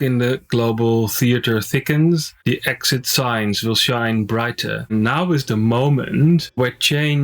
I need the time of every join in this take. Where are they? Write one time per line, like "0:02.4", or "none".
0:02.3
0:04.9